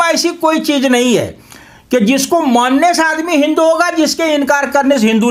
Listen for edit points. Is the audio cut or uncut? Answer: uncut